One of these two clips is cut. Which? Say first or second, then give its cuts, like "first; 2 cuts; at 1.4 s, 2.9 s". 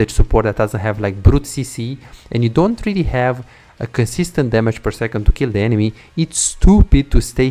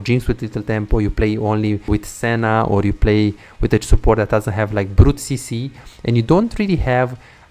second; 1 cut; at 1.9 s